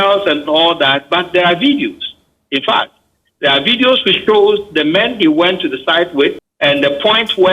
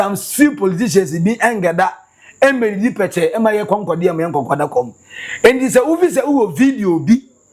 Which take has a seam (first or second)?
first